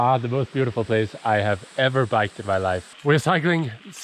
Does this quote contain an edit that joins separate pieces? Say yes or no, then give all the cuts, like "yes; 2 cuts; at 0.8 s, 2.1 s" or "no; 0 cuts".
yes; 1 cut; at 2.9 s